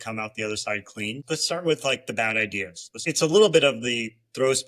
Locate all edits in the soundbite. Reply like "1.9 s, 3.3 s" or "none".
1.2 s, 3.0 s